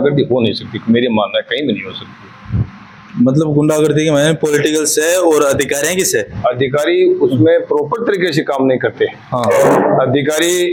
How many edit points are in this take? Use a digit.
0